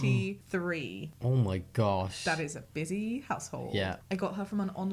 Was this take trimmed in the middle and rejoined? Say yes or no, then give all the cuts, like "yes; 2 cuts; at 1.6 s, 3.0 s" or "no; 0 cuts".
no; 0 cuts